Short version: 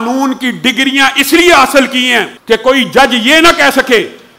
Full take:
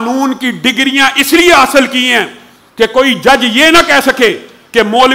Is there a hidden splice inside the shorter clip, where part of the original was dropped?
yes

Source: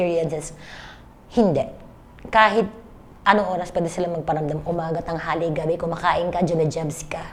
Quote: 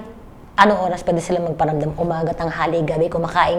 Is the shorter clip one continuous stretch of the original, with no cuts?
yes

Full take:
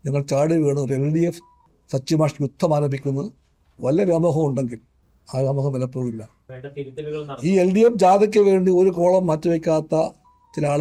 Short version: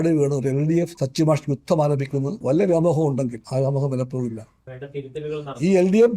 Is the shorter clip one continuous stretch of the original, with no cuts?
no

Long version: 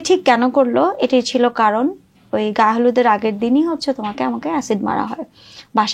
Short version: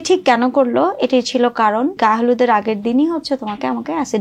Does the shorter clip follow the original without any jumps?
no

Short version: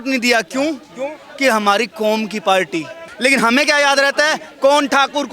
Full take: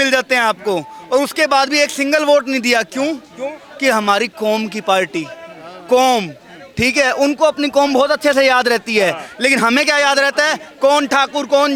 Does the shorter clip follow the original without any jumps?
no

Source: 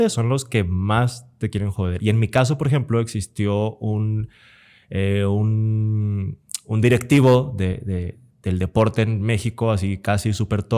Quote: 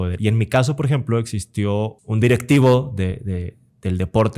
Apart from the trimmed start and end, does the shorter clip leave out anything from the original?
yes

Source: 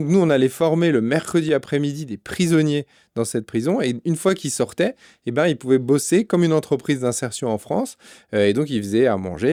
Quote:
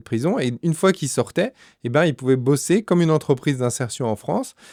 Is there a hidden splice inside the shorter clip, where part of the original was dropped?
no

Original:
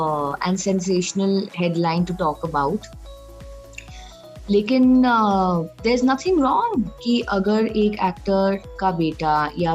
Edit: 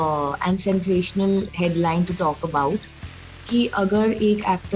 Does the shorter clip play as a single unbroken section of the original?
no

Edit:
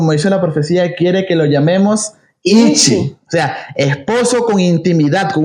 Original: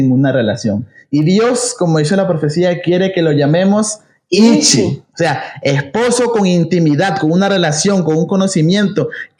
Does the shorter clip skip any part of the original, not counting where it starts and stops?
no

